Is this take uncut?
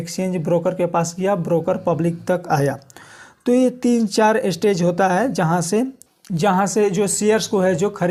yes; 0 cuts

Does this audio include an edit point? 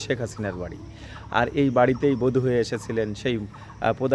no; 0 cuts

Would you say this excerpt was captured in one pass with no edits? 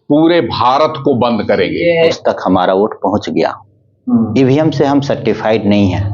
no; 1 cut; at 2.2 s

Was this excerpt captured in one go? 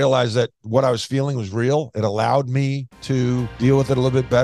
no; 1 cut; at 3.5 s

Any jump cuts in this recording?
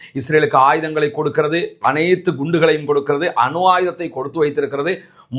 no; 0 cuts

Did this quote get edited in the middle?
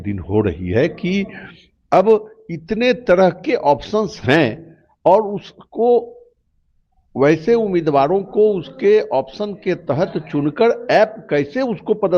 no; 0 cuts

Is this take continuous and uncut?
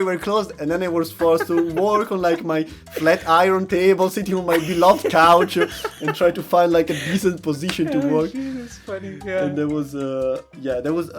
yes; 0 cuts

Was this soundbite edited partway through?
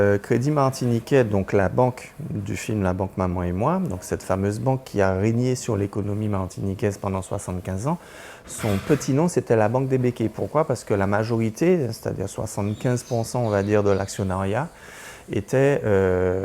no; 0 cuts

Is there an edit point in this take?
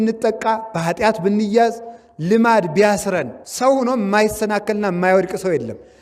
yes; 1 cut; at 3.4 s

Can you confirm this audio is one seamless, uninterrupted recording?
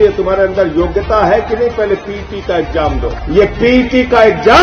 no; 1 cut; at 3.1 s

